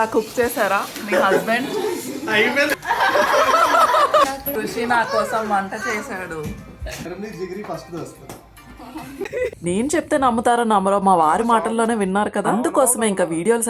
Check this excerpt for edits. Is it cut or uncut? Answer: cut